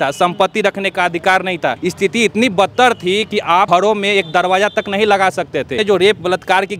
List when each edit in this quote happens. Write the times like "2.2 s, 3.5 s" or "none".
1.8 s, 3.7 s, 5.8 s